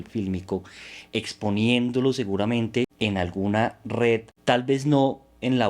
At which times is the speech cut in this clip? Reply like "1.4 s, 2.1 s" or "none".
2.9 s, 4.3 s